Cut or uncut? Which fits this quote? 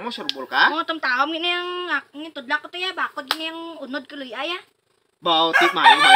cut